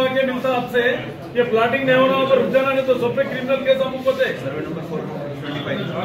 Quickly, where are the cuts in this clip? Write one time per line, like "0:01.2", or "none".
none